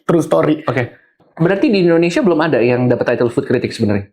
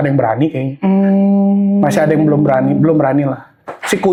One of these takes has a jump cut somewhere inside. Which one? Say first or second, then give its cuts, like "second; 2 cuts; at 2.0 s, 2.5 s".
first; 1 cut; at 1.1 s